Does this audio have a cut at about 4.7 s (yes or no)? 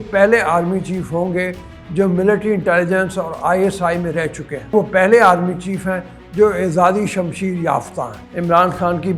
yes